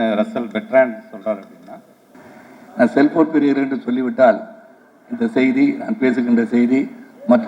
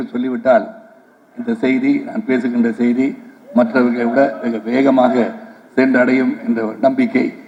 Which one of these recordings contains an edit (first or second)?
first